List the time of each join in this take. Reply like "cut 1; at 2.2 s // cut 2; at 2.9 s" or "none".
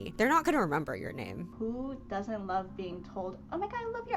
cut 1; at 1.4 s